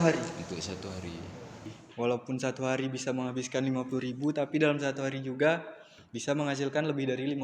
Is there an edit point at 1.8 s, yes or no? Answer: yes